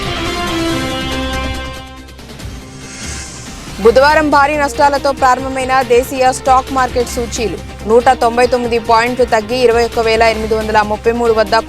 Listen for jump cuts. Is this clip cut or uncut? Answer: uncut